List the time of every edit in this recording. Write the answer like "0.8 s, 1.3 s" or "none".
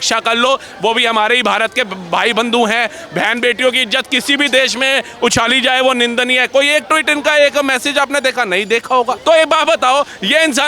9.2 s